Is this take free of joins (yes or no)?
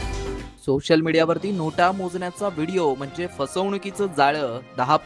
yes